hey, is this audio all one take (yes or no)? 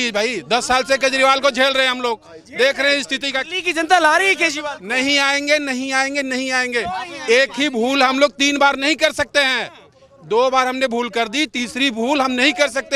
yes